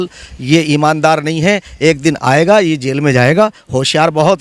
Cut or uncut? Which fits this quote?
uncut